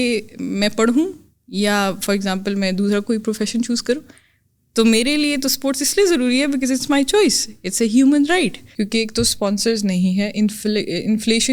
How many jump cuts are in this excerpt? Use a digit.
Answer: 1